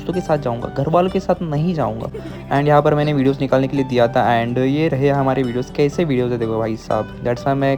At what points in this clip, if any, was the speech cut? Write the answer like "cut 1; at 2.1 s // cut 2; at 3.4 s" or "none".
none